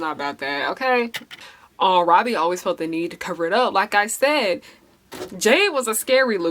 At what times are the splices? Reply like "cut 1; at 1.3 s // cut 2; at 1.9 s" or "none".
cut 1; at 1.4 s